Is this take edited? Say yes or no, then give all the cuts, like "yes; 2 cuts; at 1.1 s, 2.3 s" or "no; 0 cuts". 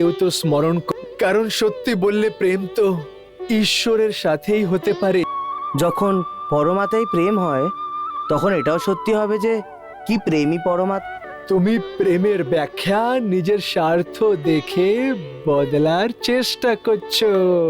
yes; 3 cuts; at 0.8 s, 5.2 s, 11.0 s